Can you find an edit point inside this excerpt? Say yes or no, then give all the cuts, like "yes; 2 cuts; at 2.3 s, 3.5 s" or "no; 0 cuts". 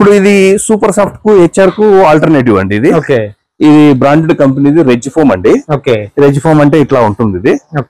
no; 0 cuts